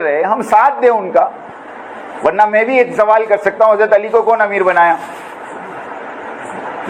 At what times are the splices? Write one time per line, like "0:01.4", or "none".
none